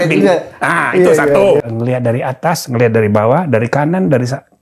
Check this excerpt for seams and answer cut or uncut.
cut